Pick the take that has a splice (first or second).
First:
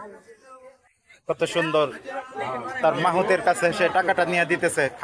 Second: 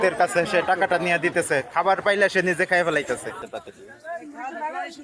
second